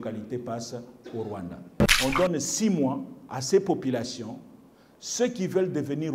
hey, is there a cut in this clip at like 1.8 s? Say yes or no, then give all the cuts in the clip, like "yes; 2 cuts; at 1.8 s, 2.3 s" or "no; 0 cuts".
yes; 1 cut; at 1.8 s